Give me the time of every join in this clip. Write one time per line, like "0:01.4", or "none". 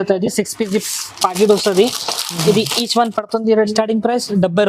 0:03.6